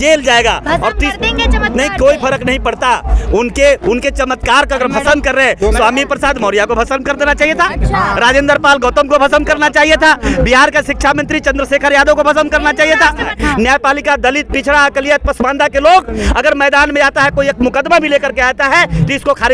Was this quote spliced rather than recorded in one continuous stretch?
yes; 1 cut; at 13.3 s

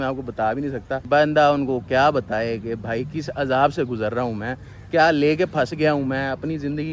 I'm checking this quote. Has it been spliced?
no; 0 cuts

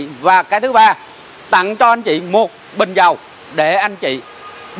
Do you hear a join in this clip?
no; 0 cuts

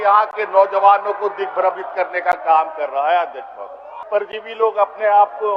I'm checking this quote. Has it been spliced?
yes; 1 cut; at 4.0 s

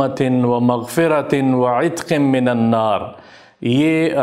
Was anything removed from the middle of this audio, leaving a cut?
no; 0 cuts

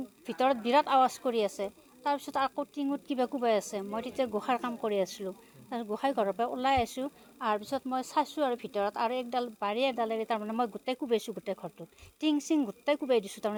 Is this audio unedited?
yes; 0 cuts

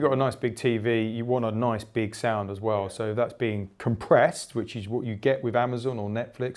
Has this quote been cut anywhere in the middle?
no; 0 cuts

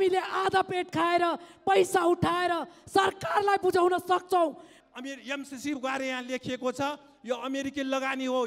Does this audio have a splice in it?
yes; 1 cut; at 4.7 s

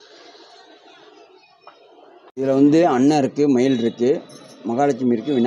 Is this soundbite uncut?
no; 1 cut; at 2.3 s

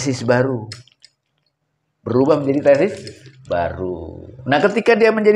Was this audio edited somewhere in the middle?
no; 0 cuts

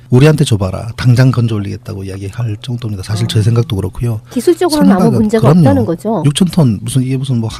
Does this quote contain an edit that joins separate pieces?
no; 0 cuts

